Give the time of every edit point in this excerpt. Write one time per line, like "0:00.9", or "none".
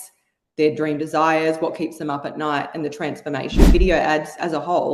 0:03.7